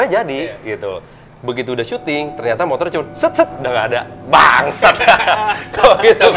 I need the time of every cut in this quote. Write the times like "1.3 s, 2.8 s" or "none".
none